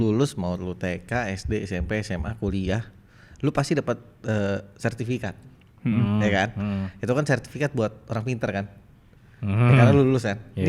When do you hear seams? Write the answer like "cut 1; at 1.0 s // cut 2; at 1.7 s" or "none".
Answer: none

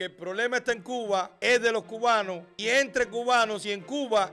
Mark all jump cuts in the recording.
cut 1; at 1.3 s // cut 2; at 2.4 s

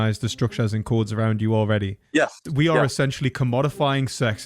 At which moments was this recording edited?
cut 1; at 2.5 s

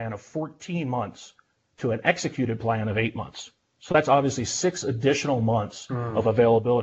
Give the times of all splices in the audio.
none

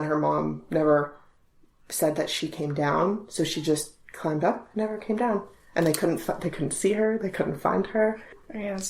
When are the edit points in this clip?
none

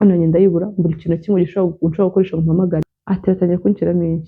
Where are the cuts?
cut 1; at 2.8 s

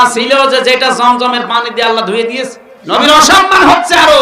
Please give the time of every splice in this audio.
cut 1; at 2.7 s

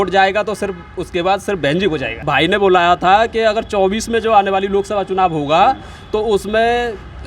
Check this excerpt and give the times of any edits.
cut 1; at 2.1 s

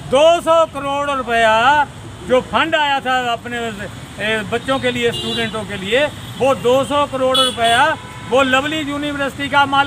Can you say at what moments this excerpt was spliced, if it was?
none

